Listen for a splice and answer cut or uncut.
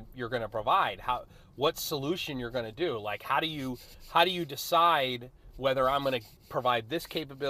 uncut